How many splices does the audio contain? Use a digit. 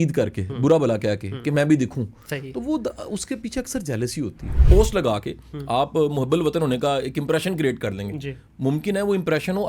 1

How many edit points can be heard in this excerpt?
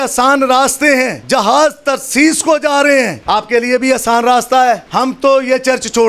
3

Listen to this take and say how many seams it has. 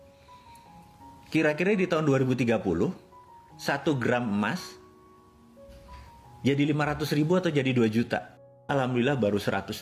1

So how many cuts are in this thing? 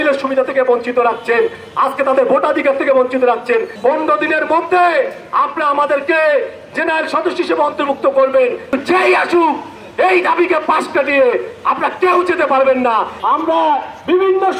3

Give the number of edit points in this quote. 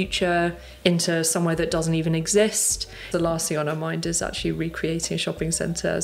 1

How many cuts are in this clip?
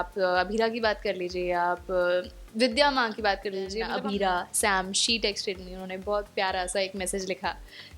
1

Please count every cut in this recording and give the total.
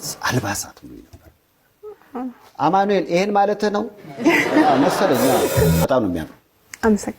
1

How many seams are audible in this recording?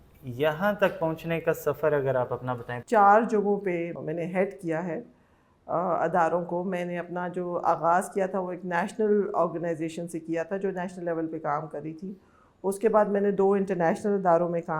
2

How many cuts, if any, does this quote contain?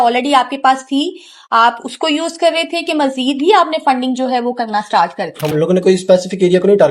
1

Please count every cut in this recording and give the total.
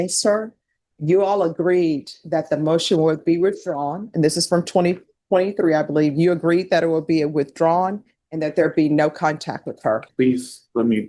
1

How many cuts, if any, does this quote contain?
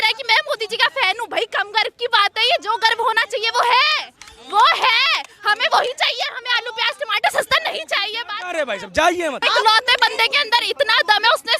1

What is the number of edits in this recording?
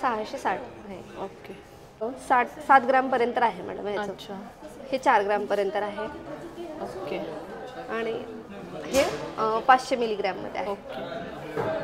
1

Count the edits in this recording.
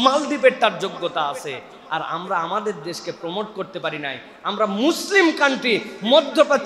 0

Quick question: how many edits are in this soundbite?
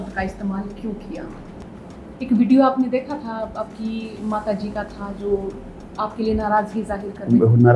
1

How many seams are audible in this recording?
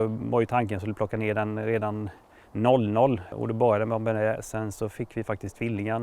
1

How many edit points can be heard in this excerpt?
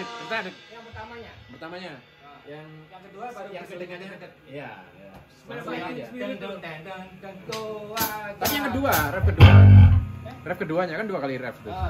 0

